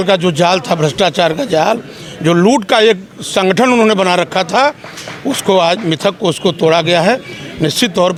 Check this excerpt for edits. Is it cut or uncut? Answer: uncut